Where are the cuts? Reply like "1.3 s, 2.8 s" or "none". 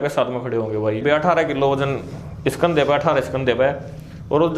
1.0 s